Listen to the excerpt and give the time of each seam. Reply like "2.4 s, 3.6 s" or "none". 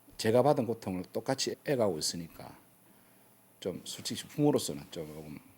1.5 s